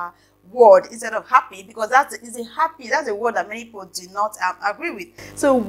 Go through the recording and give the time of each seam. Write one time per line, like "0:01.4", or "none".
none